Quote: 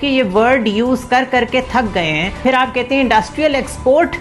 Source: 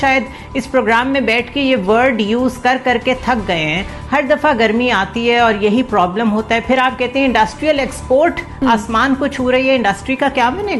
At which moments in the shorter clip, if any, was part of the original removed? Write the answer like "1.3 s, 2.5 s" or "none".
2.4 s

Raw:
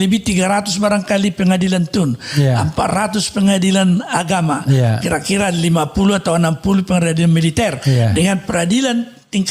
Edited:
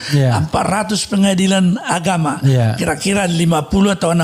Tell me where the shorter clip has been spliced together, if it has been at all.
none

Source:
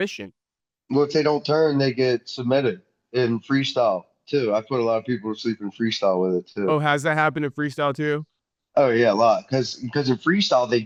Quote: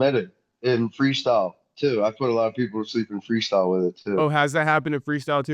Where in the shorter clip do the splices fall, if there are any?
none

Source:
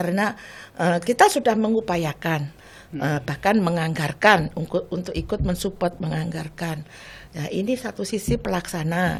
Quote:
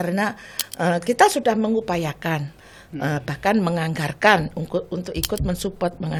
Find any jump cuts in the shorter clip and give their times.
none

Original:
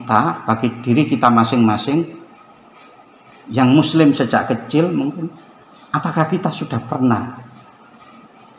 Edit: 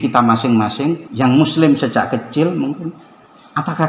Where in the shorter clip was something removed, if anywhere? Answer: 1.1 s

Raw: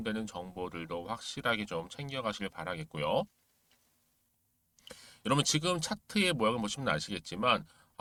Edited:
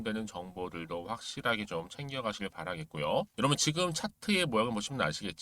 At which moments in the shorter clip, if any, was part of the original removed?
3.3 s

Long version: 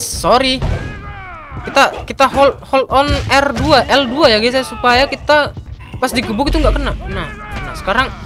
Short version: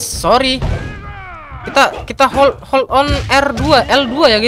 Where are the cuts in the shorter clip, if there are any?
none

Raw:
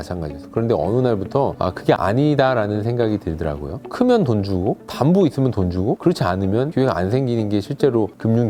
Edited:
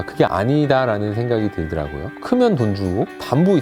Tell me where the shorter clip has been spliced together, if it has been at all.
none

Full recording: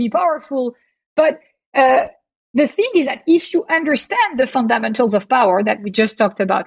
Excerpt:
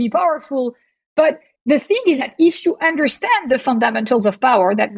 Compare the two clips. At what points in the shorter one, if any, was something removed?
1.5 s

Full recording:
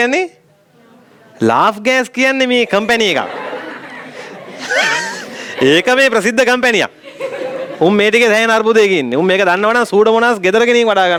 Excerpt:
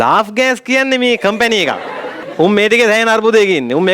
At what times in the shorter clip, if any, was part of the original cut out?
2.2 s

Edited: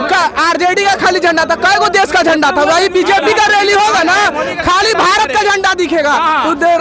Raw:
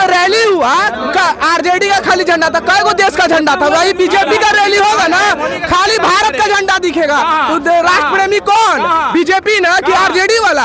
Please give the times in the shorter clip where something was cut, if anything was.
none

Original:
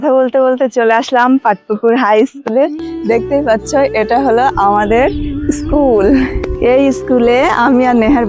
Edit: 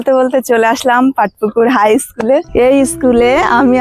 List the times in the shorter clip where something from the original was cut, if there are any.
2.5 s

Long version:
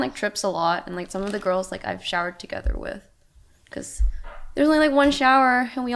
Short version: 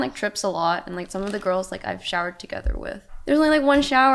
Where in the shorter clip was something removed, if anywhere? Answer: 3.1 s

